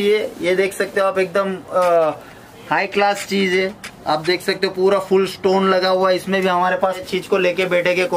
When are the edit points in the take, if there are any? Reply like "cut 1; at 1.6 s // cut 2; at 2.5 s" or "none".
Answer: cut 1; at 7.0 s